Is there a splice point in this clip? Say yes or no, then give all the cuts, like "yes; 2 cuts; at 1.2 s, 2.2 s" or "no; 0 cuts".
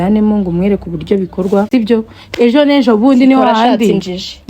yes; 1 cut; at 1.7 s